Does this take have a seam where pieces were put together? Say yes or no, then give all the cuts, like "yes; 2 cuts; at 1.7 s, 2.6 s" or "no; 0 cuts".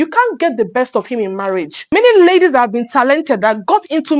yes; 1 cut; at 1.8 s